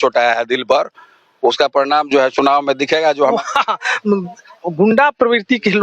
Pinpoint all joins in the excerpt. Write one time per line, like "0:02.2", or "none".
0:03.3